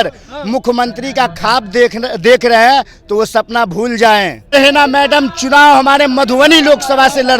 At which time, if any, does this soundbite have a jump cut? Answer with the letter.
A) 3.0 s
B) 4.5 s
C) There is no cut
B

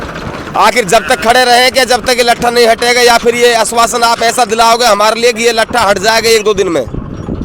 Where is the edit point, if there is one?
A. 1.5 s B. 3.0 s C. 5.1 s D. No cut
D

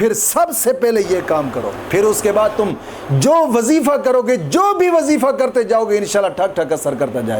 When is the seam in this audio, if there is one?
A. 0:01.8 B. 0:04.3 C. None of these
A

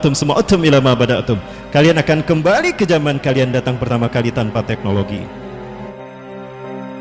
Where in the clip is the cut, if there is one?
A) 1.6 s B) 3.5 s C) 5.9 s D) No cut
C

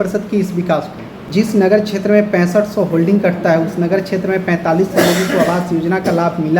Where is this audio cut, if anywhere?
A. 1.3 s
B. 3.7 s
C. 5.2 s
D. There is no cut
A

